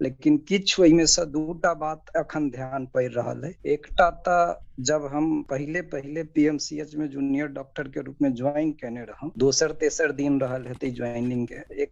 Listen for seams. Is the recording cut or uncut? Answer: uncut